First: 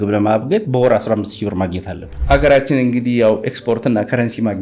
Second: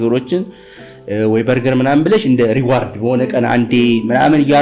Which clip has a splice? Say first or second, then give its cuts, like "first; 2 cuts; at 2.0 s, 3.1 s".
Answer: first; 1 cut; at 2.1 s